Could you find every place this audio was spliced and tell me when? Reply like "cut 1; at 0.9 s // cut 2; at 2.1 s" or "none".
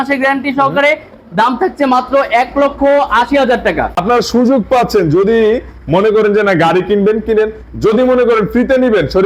cut 1; at 3.9 s